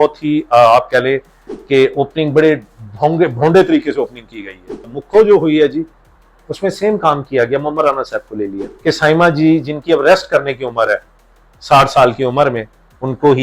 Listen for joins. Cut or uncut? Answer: cut